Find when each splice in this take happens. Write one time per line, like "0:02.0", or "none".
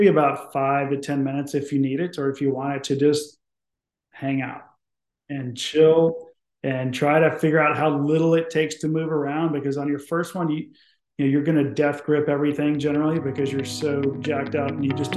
none